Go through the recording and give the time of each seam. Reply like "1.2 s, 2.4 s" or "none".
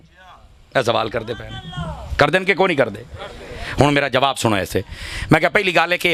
none